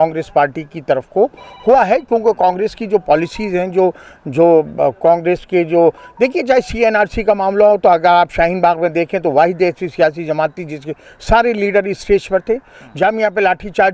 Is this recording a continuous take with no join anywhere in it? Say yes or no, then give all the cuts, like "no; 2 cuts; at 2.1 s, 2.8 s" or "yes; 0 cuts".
yes; 0 cuts